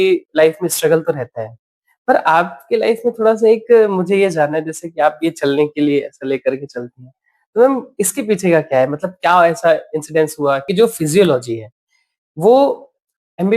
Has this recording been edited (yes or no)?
yes